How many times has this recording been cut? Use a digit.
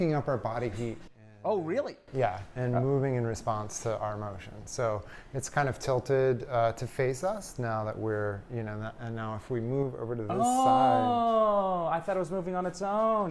0